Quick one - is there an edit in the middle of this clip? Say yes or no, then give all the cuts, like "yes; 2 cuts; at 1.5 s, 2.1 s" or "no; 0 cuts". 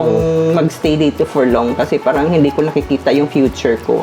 no; 0 cuts